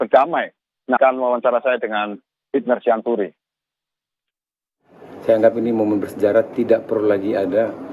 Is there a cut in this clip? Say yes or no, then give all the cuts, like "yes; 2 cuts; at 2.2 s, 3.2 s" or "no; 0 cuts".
yes; 1 cut; at 1.0 s